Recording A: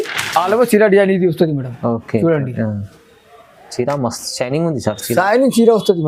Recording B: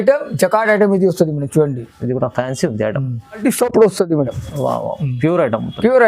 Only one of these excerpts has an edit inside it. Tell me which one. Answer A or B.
B